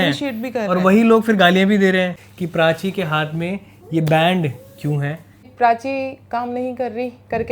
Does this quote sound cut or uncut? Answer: cut